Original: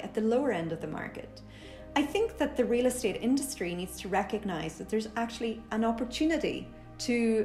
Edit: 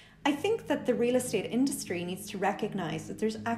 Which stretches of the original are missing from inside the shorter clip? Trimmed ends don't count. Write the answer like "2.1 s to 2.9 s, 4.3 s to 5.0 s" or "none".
none